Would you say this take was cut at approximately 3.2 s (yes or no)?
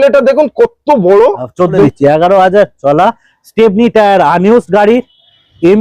no